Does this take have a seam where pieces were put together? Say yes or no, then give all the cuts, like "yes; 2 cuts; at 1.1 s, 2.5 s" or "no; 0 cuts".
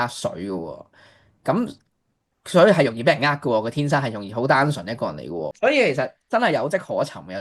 yes; 1 cut; at 5.5 s